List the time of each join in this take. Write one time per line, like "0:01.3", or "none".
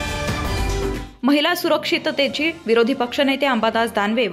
0:01.0